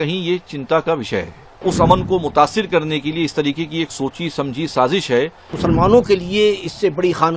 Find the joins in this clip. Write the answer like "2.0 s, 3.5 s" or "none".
1.6 s, 5.5 s